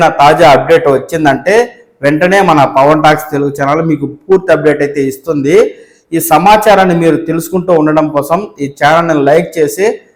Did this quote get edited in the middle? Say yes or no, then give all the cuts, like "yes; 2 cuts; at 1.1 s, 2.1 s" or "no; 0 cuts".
no; 0 cuts